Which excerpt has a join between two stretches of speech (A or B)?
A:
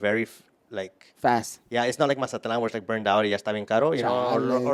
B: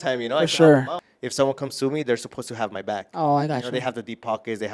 B